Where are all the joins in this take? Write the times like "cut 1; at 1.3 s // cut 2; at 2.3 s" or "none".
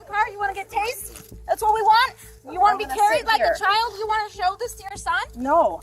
none